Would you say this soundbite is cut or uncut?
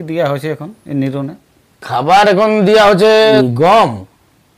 cut